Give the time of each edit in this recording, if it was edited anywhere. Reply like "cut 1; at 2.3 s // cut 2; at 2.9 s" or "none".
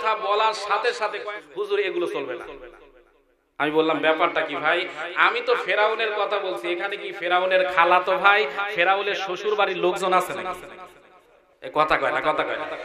cut 1; at 1.2 s